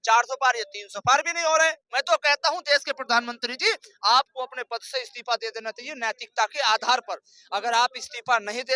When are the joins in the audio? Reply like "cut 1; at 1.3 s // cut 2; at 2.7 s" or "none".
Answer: cut 1; at 1.8 s